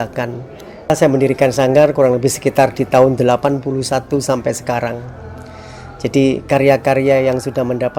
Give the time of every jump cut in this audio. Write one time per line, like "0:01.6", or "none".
0:00.9